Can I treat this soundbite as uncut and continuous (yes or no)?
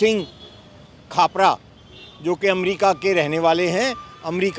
yes